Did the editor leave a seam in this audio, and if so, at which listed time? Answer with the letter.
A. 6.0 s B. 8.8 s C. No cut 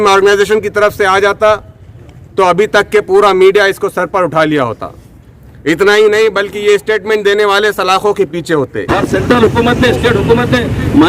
B